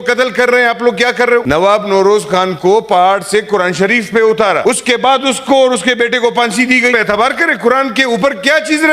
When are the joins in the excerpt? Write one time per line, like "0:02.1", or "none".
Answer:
0:01.4
0:04.6
0:06.9